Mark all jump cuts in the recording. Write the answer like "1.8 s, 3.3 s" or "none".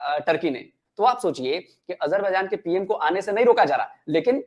none